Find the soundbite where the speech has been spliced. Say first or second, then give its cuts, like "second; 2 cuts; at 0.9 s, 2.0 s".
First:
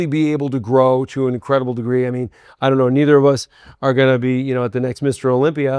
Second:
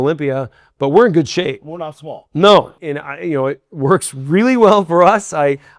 second; 1 cut; at 2.8 s